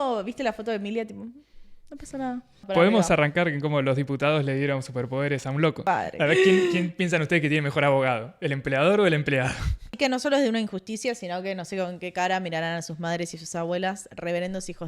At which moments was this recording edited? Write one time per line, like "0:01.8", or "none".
0:02.6
0:05.8
0:09.9